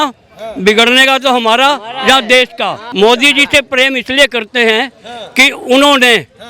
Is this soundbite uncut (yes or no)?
no